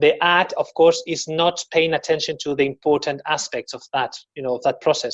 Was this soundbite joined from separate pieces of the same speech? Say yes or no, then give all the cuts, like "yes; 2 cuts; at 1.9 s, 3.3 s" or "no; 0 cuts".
no; 0 cuts